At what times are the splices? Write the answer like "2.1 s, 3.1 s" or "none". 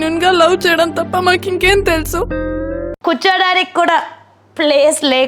2.8 s